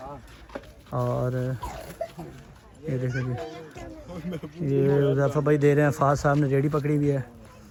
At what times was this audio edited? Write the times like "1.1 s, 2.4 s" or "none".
none